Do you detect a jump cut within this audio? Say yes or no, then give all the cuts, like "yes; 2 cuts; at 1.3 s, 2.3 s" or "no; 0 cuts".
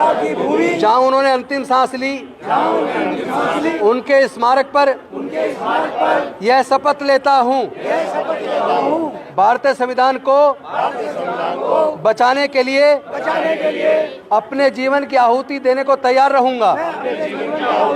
yes; 2 cuts; at 3.7 s, 9.2 s